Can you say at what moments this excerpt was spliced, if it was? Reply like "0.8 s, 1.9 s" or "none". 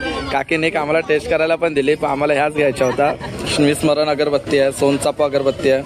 3.4 s